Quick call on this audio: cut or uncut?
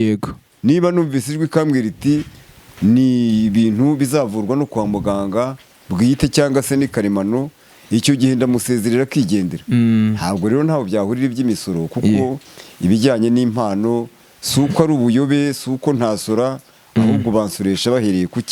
uncut